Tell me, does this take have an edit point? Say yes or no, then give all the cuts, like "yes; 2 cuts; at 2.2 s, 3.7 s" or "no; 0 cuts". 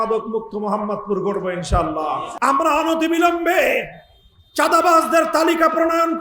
yes; 1 cut; at 2.3 s